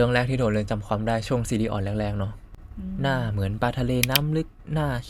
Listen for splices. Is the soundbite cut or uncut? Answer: uncut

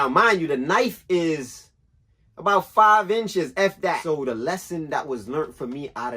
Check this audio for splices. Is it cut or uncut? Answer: cut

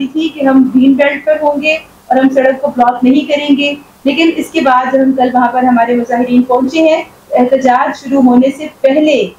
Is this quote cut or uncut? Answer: uncut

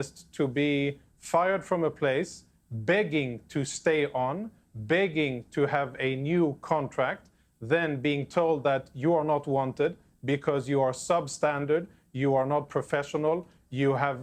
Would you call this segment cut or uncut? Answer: uncut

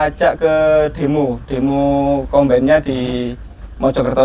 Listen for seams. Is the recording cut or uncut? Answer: uncut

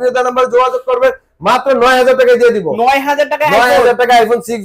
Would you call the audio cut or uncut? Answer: uncut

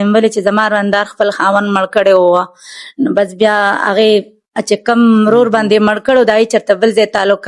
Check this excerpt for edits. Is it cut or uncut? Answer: uncut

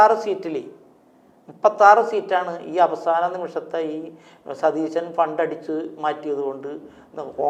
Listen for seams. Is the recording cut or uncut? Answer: uncut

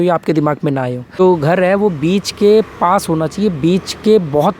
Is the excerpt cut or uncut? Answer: cut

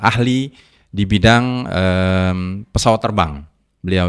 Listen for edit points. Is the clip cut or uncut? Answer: uncut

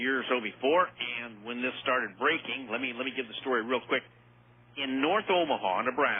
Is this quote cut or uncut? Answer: uncut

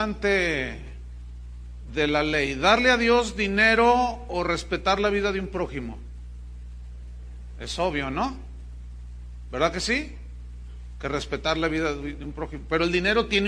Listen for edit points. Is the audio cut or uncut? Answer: cut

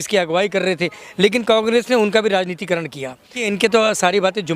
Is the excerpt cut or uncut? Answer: cut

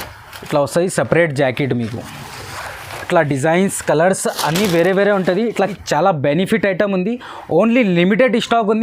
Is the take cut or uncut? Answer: cut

